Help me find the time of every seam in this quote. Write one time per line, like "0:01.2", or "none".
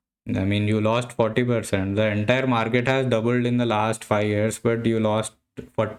none